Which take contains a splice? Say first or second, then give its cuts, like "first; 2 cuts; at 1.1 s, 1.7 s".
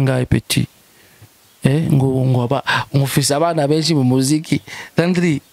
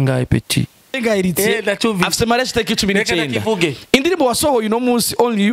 second; 1 cut; at 1.0 s